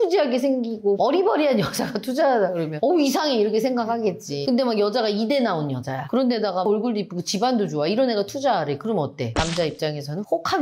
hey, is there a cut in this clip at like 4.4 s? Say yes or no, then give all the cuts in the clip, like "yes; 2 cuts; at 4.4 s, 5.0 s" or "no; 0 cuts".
yes; 2 cuts; at 4.4 s, 6.0 s